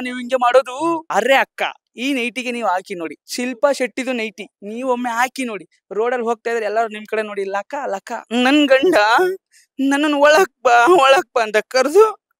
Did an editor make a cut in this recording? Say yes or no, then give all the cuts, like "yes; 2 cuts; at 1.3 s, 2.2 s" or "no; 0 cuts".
yes; 3 cuts; at 1.1 s, 3.2 s, 8.2 s